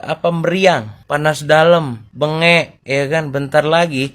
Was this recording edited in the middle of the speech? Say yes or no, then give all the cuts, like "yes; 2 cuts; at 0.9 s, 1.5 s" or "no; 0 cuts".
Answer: yes; 2 cuts; at 1.0 s, 2.0 s